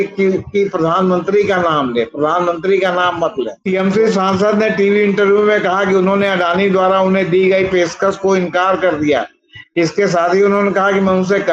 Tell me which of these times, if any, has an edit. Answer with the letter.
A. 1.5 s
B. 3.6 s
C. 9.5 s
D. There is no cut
B